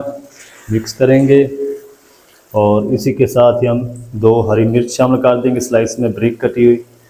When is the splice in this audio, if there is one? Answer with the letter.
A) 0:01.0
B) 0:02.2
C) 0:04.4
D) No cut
D